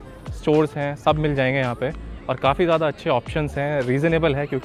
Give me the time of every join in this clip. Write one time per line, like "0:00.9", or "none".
none